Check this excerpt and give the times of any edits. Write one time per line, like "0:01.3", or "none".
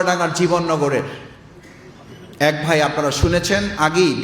none